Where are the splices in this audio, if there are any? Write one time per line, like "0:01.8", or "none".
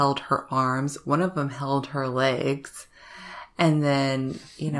none